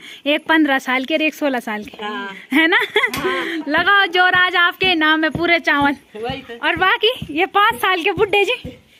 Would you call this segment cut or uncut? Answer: uncut